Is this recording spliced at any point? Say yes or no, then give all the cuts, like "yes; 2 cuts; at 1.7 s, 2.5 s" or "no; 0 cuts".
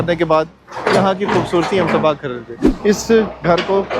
yes; 1 cut; at 2.5 s